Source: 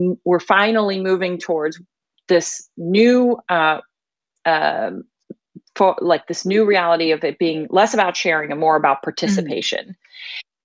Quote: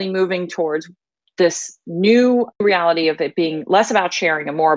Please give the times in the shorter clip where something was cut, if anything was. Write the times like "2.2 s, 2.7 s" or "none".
2.6 s